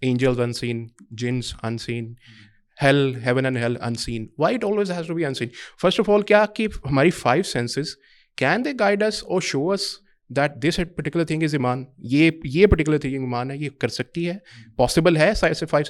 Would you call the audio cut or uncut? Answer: uncut